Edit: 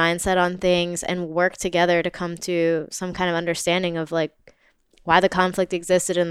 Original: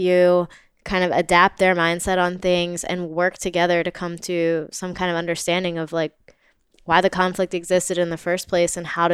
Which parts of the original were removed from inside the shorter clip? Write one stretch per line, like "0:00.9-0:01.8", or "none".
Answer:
none